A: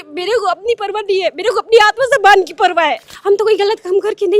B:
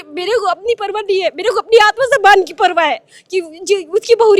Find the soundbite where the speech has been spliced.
A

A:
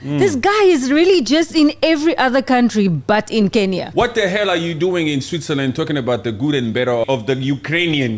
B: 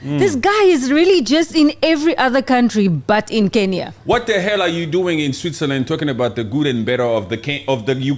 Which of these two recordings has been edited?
A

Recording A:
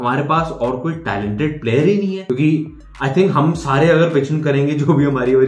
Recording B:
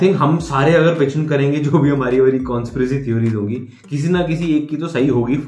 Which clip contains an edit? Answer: A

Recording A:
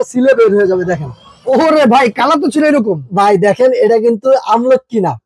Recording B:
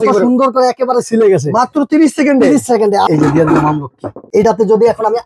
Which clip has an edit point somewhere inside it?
B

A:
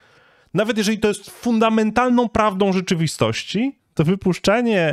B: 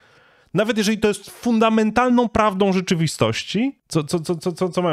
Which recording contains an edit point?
B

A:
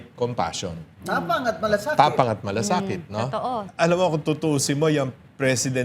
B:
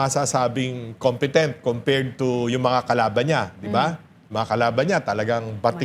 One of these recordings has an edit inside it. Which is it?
A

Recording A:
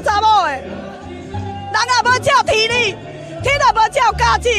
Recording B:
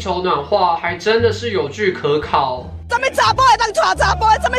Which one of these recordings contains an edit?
B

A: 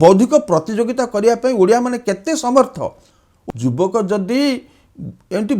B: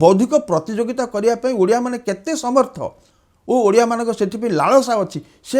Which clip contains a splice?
A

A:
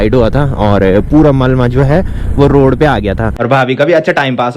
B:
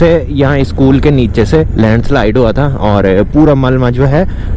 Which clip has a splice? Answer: A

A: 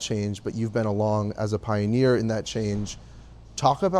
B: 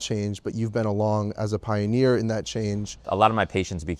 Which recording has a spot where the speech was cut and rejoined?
B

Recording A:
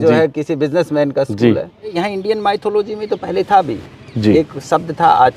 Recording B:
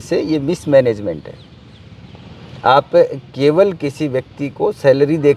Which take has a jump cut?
A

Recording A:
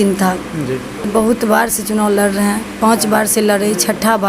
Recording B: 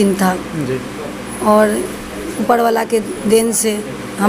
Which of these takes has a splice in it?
A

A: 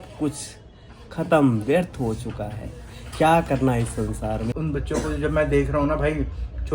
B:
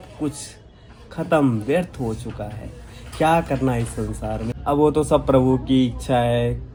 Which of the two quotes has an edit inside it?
A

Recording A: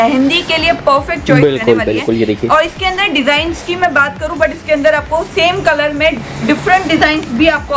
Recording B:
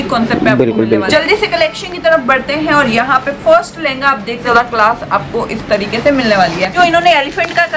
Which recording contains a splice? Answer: B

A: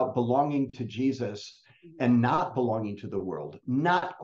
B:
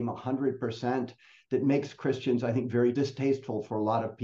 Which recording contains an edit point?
B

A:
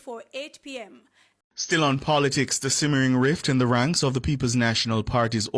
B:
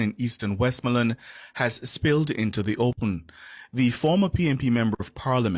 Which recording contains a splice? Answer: A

